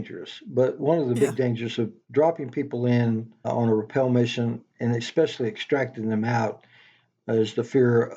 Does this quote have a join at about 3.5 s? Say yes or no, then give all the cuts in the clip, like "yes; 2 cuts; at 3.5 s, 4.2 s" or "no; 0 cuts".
yes; 2 cuts; at 2.0 s, 3.5 s